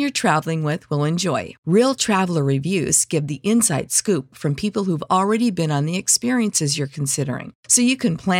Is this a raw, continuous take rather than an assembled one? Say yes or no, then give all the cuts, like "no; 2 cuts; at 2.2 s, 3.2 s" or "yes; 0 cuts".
yes; 0 cuts